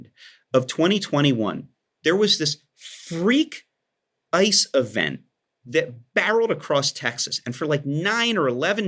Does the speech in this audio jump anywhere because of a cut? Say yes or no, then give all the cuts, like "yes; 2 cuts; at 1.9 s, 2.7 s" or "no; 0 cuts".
no; 0 cuts